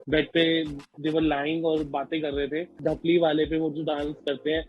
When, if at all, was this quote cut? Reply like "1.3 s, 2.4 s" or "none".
2.8 s